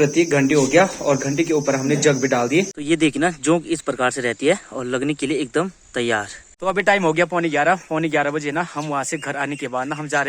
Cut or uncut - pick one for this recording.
cut